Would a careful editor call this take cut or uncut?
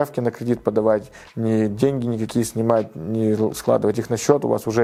uncut